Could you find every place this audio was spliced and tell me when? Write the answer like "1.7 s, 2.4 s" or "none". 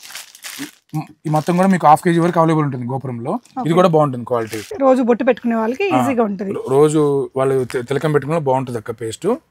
4.8 s